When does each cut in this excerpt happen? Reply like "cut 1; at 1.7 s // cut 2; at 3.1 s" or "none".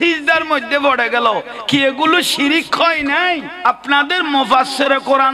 cut 1; at 3.7 s